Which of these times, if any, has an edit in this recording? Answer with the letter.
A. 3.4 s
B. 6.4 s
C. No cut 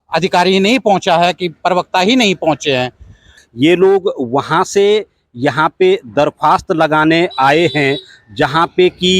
A